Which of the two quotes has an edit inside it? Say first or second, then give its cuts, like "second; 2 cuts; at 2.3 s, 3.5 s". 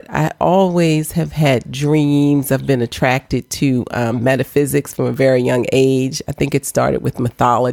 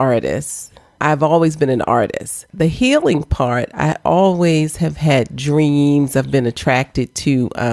second; 2 cuts; at 0.9 s, 2.5 s